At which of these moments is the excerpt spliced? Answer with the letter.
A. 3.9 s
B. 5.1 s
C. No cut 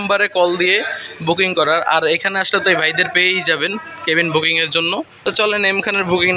B